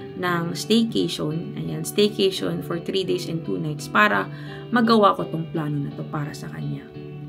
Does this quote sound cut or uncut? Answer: uncut